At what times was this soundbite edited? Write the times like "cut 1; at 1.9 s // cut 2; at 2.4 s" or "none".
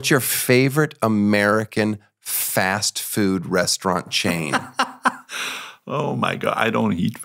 none